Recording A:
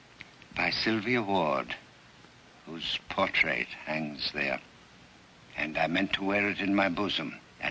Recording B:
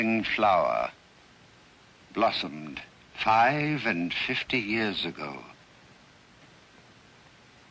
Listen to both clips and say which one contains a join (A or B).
A